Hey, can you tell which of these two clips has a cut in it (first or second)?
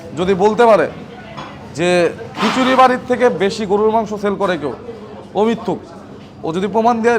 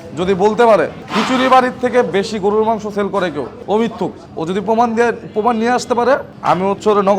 second